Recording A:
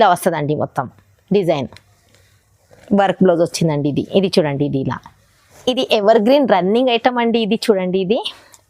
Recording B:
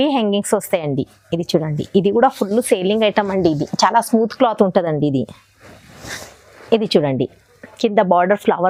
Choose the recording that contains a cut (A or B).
A